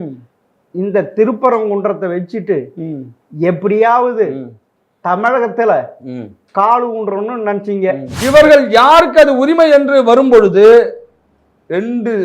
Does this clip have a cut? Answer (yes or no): yes